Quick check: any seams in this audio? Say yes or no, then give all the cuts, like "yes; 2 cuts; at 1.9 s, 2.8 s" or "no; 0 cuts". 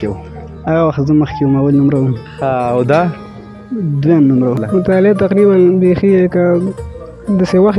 yes; 1 cut; at 4.6 s